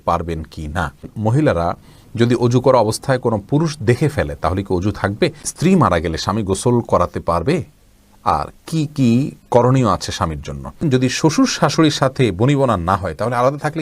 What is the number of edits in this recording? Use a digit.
3